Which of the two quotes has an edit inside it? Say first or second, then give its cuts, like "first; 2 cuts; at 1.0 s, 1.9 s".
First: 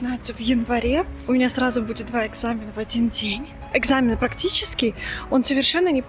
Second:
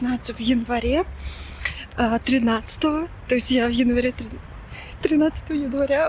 first; 2 cuts; at 1.2 s, 3.6 s